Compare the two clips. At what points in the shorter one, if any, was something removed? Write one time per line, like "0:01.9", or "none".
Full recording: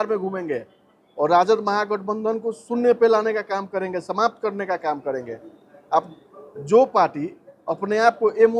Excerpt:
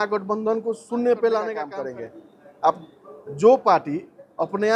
0:01.7